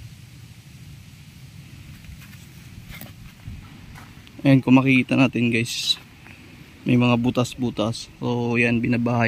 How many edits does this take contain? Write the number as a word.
one